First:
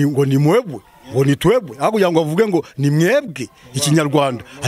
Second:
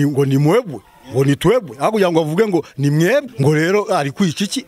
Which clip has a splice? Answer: second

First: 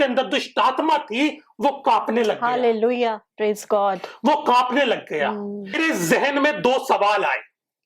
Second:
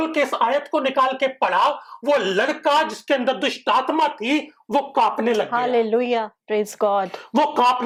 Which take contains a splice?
first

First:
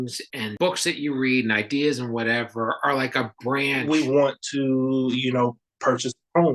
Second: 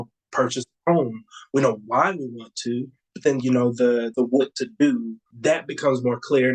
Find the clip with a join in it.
first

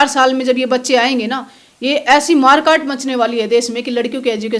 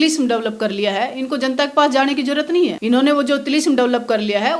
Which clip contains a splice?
second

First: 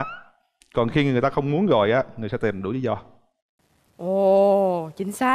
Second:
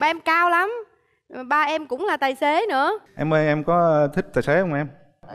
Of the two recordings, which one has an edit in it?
second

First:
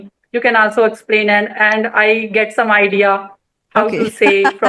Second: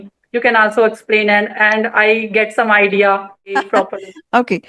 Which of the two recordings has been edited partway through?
second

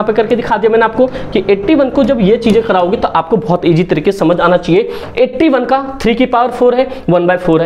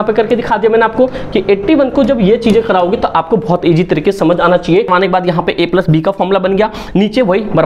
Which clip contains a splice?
second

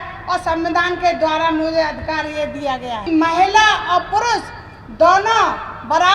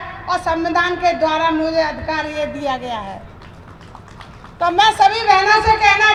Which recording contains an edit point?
first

